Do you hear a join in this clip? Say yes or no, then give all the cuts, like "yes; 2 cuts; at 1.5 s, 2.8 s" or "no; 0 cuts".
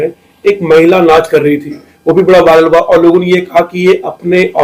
no; 0 cuts